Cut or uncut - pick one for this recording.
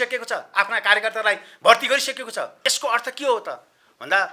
cut